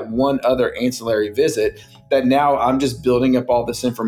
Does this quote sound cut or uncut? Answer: uncut